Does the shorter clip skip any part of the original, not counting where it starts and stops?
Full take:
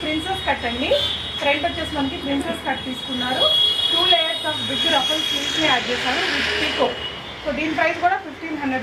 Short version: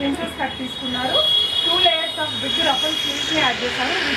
no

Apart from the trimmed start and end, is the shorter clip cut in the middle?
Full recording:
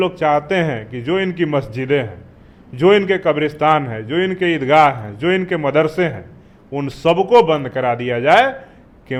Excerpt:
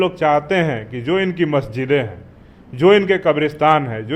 no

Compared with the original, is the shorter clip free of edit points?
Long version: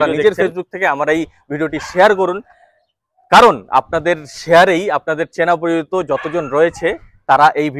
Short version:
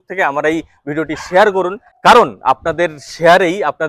no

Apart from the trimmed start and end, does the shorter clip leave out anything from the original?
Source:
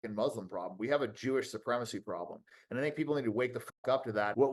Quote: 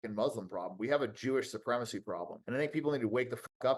yes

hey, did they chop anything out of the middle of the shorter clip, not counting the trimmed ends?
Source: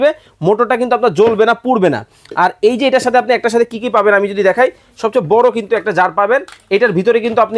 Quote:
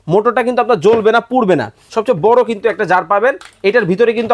yes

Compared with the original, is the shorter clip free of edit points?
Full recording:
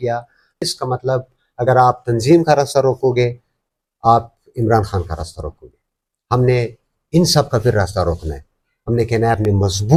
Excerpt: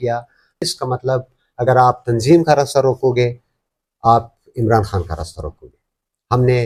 yes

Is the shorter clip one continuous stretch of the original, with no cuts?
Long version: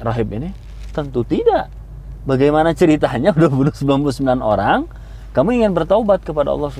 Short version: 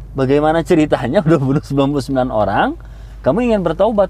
yes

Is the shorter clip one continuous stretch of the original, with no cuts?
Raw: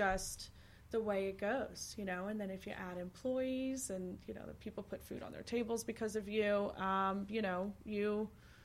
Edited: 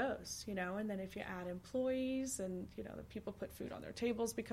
yes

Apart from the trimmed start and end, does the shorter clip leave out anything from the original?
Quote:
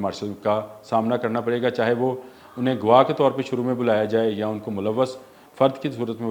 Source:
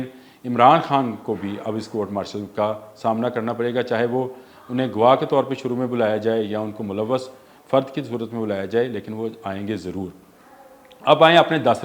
no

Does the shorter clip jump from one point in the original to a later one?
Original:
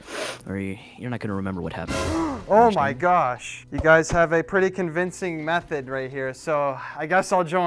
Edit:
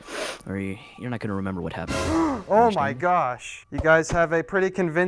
no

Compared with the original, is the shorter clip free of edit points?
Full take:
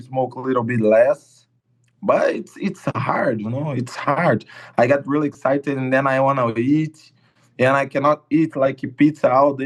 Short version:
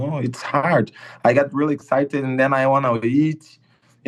yes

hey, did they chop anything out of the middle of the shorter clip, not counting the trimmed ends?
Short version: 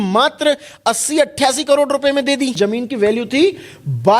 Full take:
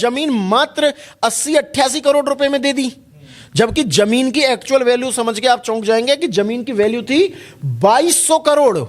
yes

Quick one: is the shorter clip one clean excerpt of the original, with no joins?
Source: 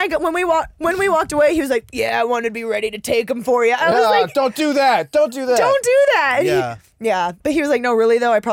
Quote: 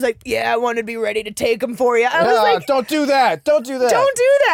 yes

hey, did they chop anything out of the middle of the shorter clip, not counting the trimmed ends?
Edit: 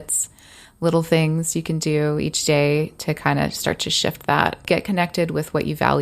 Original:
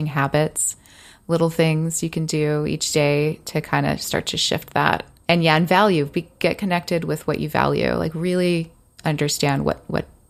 yes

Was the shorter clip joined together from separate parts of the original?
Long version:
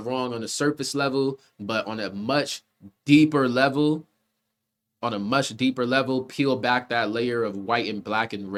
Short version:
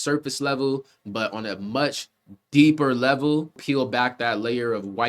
yes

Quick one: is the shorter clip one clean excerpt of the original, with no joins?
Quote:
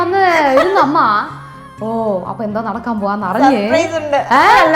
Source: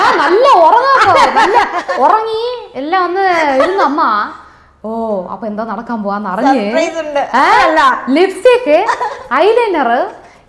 yes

